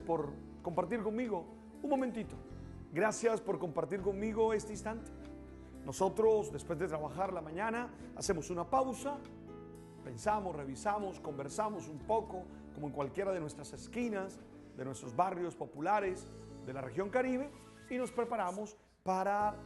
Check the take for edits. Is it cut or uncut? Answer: uncut